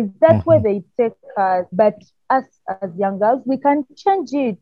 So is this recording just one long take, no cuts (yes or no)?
no